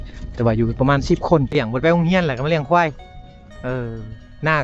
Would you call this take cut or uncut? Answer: cut